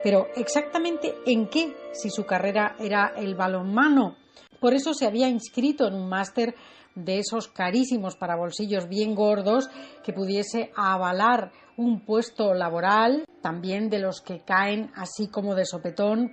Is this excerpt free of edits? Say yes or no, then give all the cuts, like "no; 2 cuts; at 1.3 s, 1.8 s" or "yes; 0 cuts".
yes; 0 cuts